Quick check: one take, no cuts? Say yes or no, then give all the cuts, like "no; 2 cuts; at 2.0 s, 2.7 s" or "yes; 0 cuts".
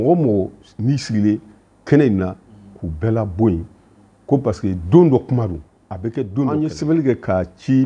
no; 1 cut; at 6.6 s